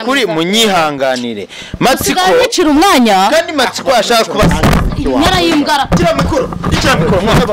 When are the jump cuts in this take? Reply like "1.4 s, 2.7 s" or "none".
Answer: 6.0 s